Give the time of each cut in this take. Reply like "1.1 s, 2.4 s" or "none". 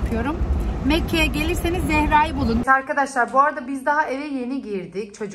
2.6 s